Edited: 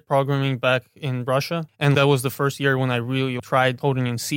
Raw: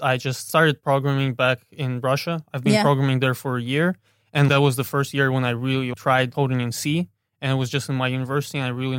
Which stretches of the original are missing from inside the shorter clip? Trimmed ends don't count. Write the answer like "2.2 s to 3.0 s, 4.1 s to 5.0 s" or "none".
2.5 s to 4.2 s

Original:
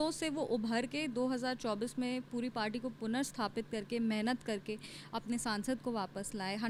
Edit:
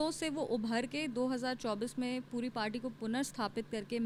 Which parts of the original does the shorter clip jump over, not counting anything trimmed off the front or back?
none

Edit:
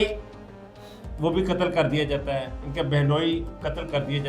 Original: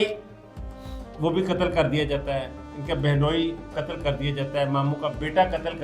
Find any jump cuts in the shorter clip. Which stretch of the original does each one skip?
2.6 s to 2.7 s

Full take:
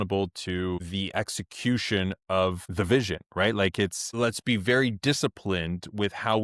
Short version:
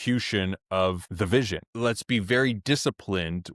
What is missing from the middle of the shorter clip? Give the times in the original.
3.2 s to 4.0 s

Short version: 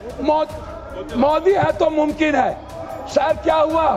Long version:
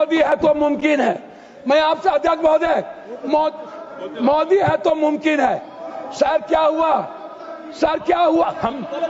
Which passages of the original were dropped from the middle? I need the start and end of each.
none

